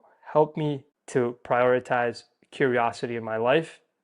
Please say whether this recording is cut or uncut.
cut